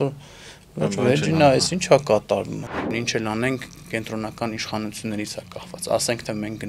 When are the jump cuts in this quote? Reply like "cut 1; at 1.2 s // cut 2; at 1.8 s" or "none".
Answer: cut 1; at 2.9 s